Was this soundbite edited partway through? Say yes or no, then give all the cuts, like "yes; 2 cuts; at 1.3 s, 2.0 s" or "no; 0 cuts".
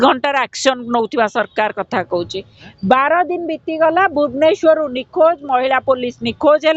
no; 0 cuts